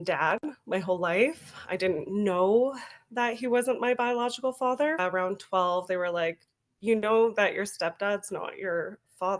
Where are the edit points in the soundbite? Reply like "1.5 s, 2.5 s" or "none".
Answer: 5.0 s